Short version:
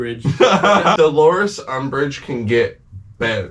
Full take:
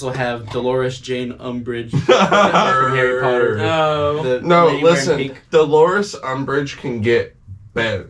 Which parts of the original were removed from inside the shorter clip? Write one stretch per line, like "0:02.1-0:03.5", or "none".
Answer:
0:02.6-0:05.5